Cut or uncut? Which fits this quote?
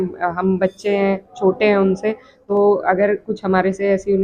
cut